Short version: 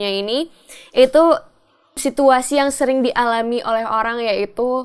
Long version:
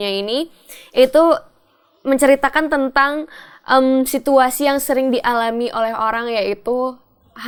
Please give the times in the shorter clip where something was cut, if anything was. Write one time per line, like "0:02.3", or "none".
0:02.0